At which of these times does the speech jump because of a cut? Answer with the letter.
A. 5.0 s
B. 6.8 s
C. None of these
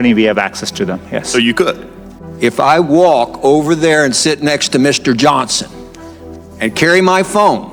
C